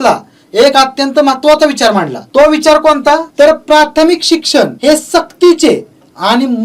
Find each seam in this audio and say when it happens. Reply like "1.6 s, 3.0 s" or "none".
2.2 s, 3.3 s, 4.7 s